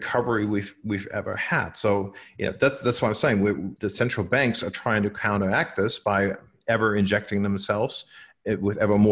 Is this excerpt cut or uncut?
cut